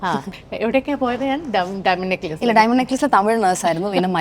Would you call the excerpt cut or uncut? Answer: uncut